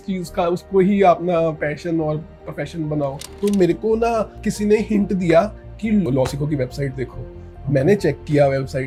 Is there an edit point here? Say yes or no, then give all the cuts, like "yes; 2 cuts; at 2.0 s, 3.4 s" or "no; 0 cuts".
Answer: yes; 2 cuts; at 3.3 s, 6.0 s